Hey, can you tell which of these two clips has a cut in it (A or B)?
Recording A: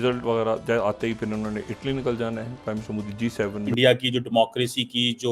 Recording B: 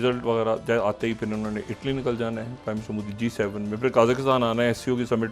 A